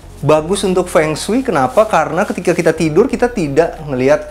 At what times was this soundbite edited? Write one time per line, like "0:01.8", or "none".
none

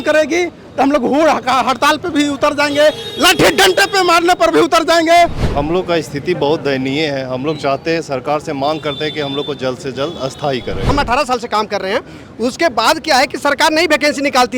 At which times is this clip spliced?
0:05.5
0:10.9

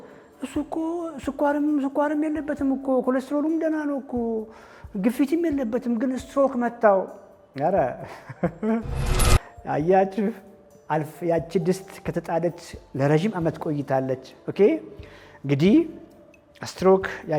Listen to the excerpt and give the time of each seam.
none

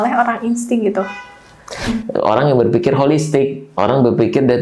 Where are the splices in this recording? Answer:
0:01.9

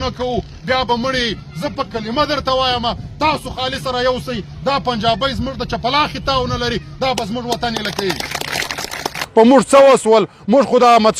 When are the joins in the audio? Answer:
0:09.2

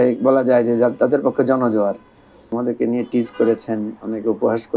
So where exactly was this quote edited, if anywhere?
0:02.5

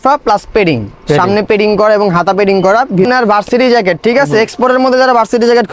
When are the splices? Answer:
0:03.1

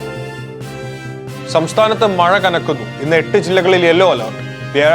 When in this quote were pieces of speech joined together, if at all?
0:01.0

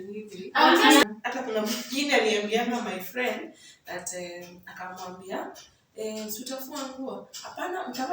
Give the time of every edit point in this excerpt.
0:01.0

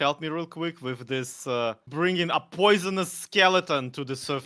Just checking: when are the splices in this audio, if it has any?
0:01.9

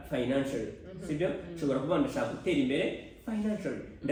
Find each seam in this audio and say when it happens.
none

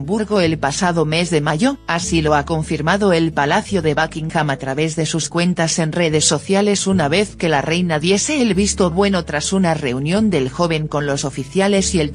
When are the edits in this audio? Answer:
0:03.0

